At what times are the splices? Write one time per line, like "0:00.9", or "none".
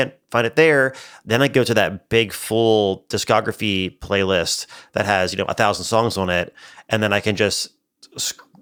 none

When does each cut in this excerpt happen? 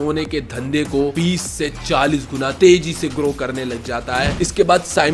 0:01.1
0:02.5
0:04.3

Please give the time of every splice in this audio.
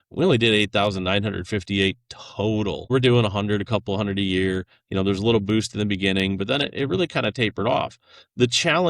0:02.9

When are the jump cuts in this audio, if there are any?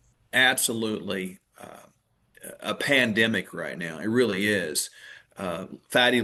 none

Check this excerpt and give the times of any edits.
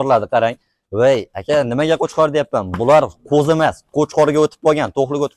none

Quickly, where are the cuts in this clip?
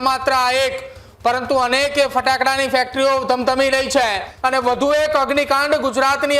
0:04.3

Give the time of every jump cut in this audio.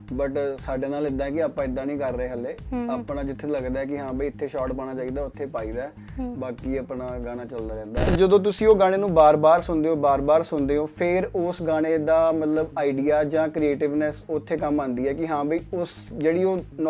0:08.1

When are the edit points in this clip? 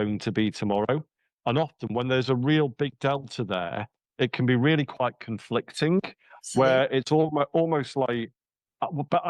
none

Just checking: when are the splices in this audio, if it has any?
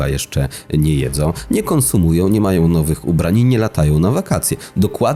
none

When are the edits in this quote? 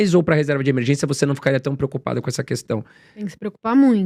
none

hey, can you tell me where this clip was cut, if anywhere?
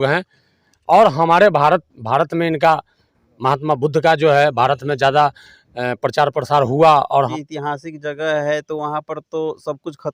0:07.3

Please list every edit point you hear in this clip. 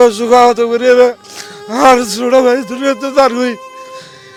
none

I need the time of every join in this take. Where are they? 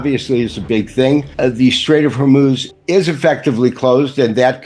0:01.3
0:02.7

